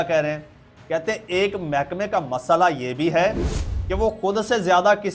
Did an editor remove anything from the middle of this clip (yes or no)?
no